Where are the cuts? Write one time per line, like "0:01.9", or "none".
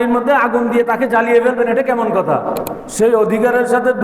0:02.8